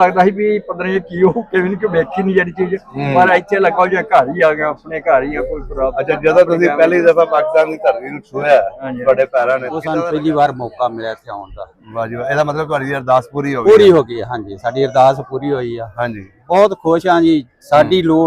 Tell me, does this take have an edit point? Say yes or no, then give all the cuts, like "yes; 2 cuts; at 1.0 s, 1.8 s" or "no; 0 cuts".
yes; 1 cut; at 9.8 s